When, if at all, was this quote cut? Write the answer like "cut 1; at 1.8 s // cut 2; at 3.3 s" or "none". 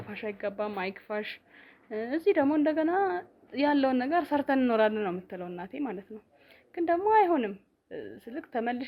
none